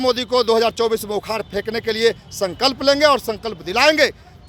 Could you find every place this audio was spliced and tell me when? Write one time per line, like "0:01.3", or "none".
none